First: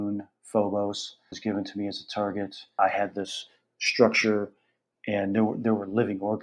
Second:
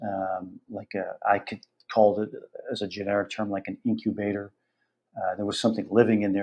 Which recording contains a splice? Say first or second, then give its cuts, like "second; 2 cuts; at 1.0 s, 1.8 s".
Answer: first; 2 cuts; at 1.3 s, 2.7 s